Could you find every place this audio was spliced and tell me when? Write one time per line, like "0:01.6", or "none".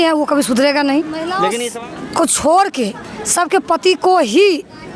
0:01.5